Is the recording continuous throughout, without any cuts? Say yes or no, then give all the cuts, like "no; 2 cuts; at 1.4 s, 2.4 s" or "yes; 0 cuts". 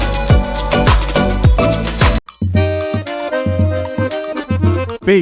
no; 1 cut; at 2.3 s